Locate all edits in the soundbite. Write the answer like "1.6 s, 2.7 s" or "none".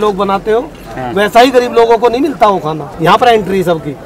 2.8 s